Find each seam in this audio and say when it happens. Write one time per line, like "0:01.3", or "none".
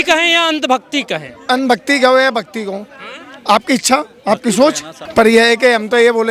0:04.9